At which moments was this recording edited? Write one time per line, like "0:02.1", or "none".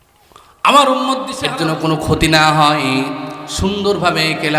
0:01.3